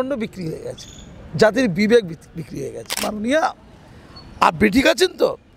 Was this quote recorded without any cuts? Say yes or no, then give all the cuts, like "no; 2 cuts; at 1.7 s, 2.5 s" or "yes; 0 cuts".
no; 1 cut; at 3.1 s